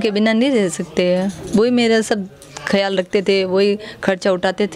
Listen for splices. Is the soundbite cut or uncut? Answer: uncut